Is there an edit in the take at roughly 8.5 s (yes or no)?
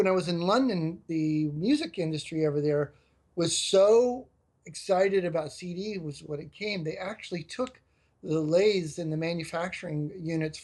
no